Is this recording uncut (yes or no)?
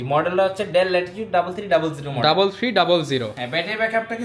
yes